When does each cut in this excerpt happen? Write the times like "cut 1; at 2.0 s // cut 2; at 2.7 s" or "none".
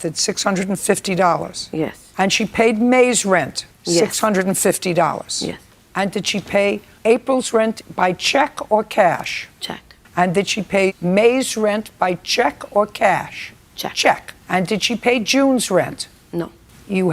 none